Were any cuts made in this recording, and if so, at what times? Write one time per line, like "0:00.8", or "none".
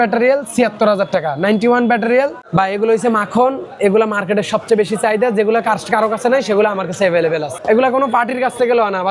0:02.4
0:07.5